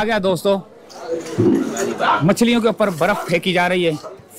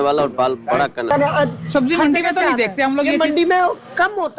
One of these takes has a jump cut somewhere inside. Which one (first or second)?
second